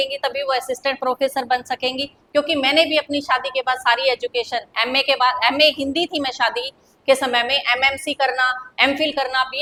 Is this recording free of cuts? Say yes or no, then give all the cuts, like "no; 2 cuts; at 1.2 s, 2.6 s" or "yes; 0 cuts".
yes; 0 cuts